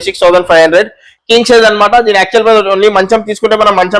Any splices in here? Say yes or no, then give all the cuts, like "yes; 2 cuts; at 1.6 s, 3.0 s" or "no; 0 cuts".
yes; 1 cut; at 1.1 s